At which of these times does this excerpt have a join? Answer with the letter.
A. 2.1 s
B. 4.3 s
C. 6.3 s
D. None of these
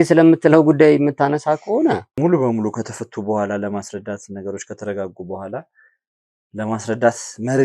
A